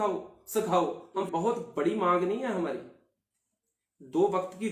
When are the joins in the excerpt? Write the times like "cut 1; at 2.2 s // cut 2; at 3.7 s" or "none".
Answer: cut 1; at 1.3 s

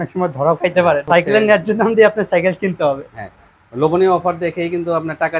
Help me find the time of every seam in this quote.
cut 1; at 1.0 s

